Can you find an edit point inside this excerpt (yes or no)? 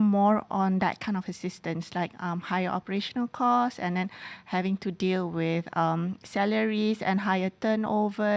no